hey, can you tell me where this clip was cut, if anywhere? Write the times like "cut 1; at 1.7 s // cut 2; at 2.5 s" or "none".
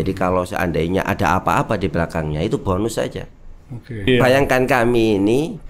cut 1; at 4.1 s